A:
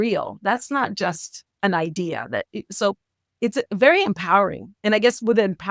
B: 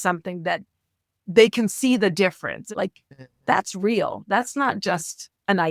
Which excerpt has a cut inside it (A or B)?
B